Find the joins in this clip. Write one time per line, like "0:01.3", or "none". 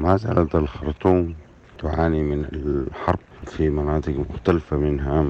0:01.7
0:03.3